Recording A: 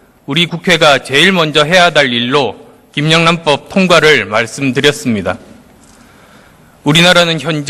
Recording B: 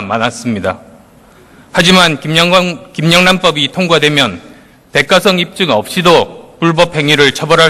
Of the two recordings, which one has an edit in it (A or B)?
B